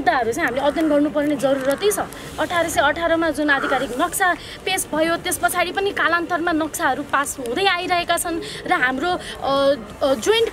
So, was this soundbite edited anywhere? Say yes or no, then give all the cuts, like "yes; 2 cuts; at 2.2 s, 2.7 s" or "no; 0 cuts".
no; 0 cuts